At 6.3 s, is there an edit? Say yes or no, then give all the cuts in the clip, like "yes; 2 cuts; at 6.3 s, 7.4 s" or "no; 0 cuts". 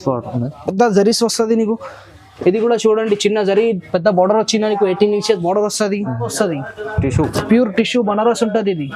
yes; 1 cut; at 6.3 s